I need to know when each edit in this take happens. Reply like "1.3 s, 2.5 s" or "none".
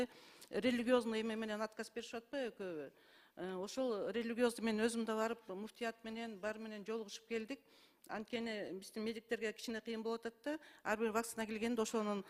none